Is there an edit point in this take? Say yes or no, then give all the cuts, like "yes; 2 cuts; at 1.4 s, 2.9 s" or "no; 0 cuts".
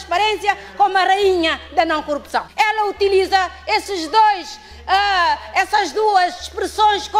yes; 1 cut; at 2.4 s